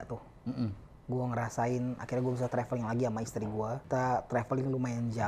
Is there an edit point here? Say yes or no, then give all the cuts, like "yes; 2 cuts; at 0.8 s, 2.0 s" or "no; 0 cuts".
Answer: yes; 1 cut; at 3.8 s